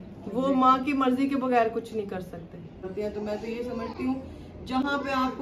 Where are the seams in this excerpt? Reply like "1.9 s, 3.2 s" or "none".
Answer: 2.9 s